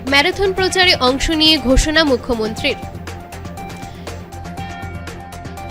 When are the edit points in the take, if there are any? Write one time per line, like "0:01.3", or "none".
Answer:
none